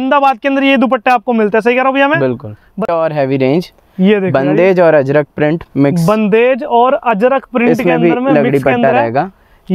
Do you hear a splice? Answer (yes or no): yes